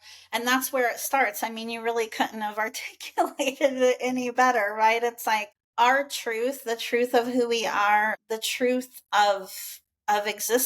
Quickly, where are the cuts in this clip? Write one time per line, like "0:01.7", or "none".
0:05.6
0:08.2